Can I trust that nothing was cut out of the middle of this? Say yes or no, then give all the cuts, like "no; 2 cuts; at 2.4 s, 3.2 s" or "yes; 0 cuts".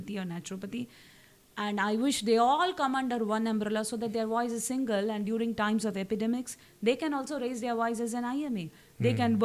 yes; 0 cuts